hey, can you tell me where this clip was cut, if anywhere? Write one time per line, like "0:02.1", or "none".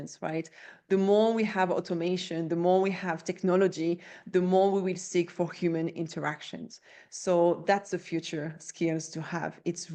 none